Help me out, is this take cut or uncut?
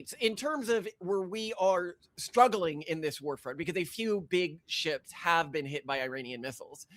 cut